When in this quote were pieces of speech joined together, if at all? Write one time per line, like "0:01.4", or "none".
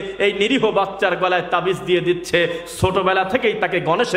none

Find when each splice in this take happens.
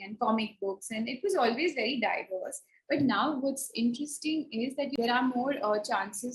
0:04.9

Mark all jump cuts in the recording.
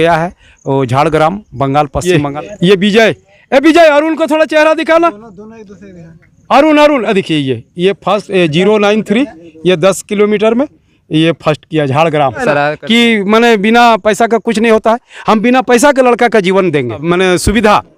0:02.0
0:12.4
0:17.0

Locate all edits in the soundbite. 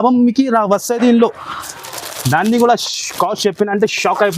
0:01.8

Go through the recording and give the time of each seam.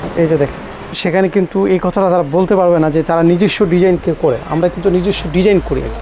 0:01.0

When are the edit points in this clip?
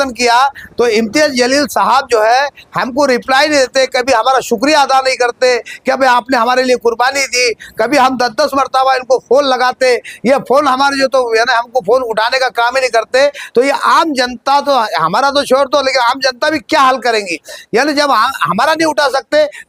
none

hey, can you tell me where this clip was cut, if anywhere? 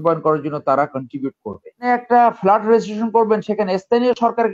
0:01.9

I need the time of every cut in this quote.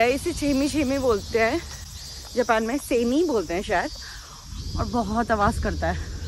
none

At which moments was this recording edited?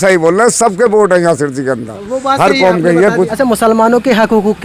0:03.3

